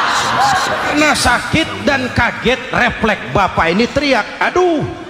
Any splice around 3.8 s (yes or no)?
no